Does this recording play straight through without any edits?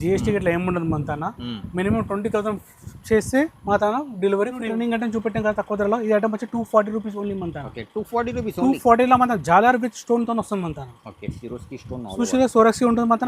no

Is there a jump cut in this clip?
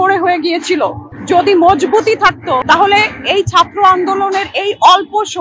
yes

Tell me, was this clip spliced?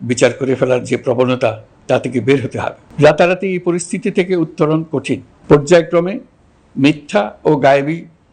yes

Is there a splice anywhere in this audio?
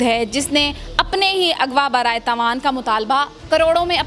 no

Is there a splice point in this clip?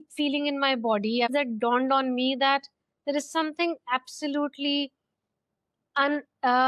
yes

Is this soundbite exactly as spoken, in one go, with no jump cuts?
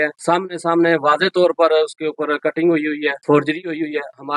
yes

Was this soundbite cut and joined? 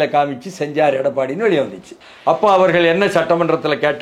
yes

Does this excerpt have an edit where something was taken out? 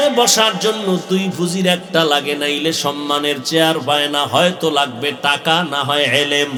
no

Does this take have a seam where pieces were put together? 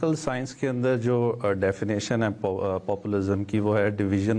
no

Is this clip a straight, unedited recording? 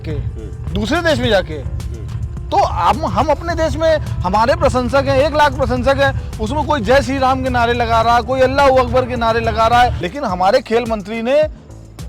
no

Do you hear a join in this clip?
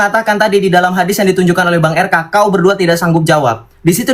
no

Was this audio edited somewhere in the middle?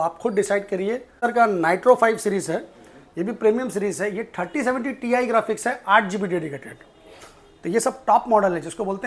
yes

